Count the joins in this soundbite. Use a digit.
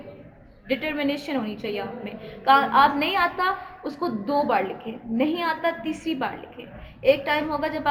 0